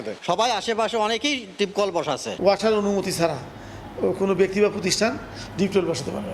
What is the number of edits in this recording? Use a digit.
0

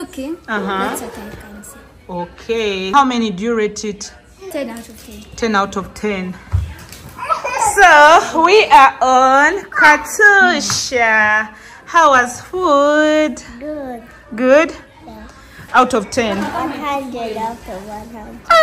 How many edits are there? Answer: 3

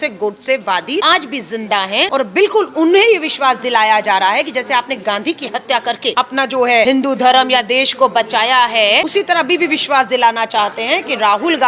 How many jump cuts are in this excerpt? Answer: 5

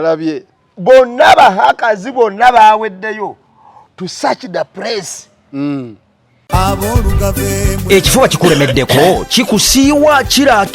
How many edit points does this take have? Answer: 1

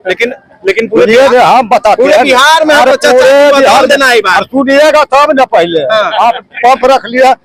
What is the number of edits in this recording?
0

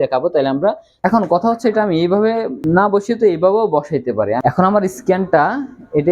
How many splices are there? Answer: 3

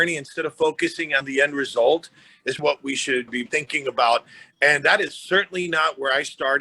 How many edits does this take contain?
2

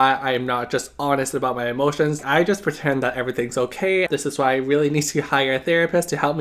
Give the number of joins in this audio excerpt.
2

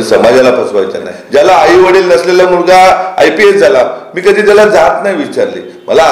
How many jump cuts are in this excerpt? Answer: 1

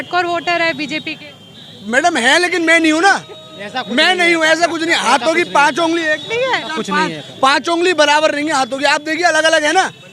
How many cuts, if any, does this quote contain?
0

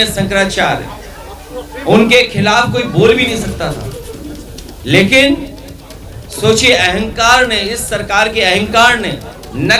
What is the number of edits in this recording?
0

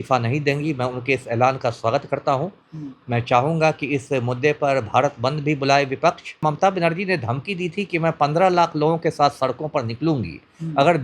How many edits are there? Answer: 1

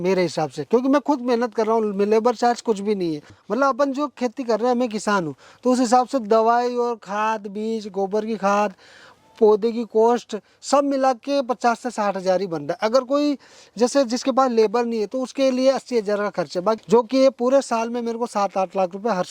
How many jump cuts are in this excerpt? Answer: 2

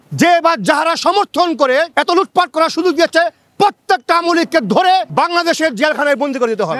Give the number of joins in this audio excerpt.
1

